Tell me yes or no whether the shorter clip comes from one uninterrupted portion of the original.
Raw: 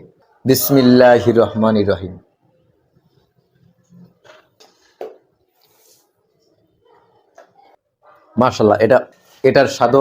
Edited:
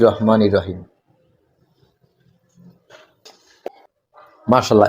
no